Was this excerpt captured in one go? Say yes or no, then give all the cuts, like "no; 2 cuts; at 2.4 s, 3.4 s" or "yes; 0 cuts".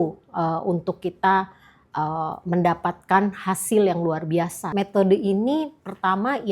no; 1 cut; at 4.7 s